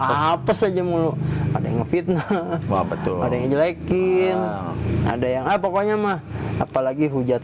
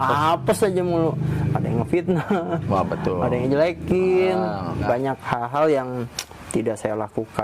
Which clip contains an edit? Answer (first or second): second